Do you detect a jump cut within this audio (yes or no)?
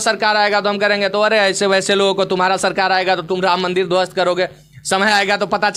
no